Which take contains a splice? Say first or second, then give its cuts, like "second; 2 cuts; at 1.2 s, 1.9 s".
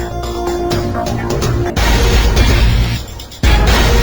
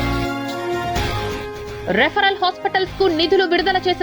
second; 1 cut; at 1.3 s